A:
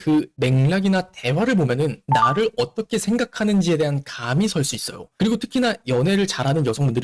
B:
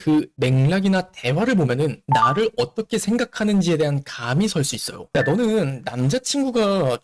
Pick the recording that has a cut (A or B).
B